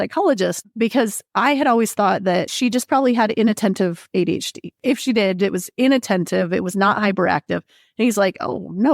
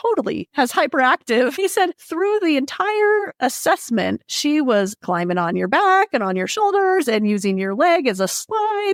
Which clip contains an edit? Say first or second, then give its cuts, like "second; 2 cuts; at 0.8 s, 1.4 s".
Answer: first; 1 cut; at 4.8 s